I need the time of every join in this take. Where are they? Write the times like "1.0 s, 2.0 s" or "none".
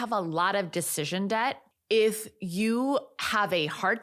1.7 s